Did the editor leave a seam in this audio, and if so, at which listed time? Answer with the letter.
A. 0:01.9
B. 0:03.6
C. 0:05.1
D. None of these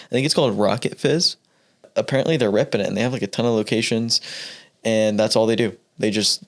A